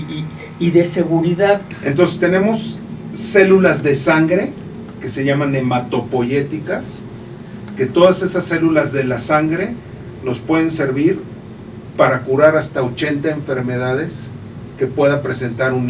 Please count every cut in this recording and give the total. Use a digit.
1